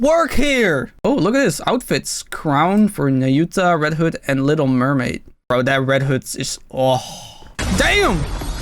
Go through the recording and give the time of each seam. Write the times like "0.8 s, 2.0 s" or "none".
0.9 s, 7.5 s